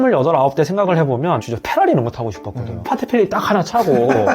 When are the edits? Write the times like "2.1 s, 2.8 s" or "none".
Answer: 2.8 s